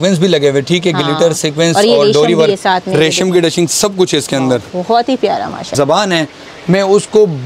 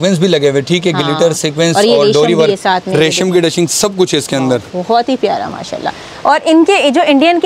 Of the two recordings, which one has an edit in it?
first; 1 cut; at 5.7 s

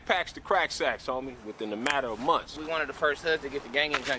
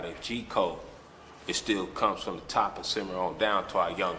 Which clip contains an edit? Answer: first; 1 cut; at 2.6 s

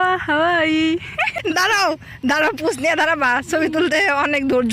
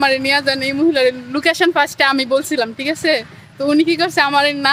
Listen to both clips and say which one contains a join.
first; 1 cut; at 1.4 s

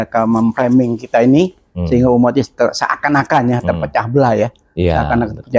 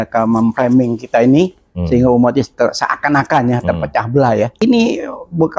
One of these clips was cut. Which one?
second; 1 cut; at 4.6 s

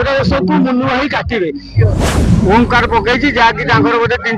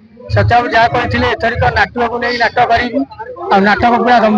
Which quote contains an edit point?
first; 1 cut; at 2.1 s

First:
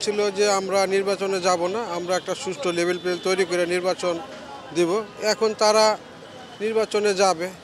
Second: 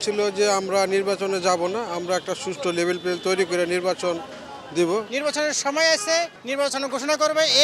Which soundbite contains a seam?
second; 2 cuts; at 5.1 s, 6.4 s

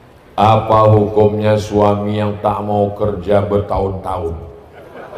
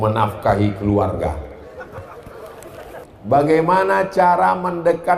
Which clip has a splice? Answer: second; 1 cut; at 3.0 s

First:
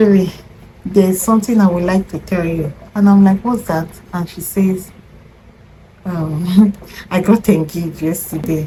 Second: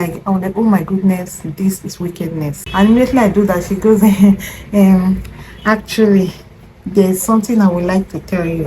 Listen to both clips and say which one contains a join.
second; 1 cut; at 2.6 s

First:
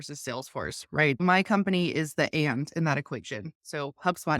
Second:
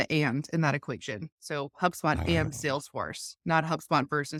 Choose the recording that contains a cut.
first; 1 cut; at 1.2 s

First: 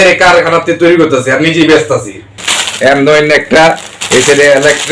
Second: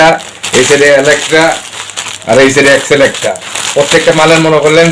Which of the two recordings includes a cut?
first; 1 cut; at 2.4 s

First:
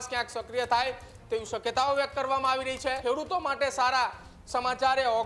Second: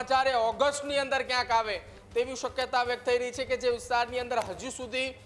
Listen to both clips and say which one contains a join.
first; 1 cut; at 3.0 s

